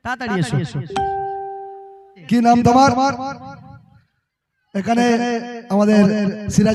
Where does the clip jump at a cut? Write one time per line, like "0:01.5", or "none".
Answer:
0:02.1